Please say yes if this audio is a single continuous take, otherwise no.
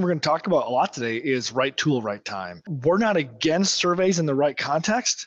no